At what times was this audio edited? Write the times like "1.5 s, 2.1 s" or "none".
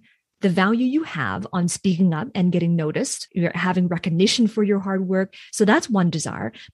3.2 s